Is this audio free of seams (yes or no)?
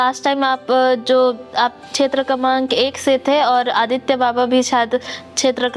yes